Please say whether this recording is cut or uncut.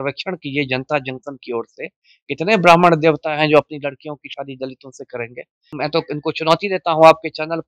cut